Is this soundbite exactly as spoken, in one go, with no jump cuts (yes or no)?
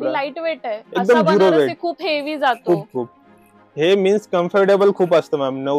yes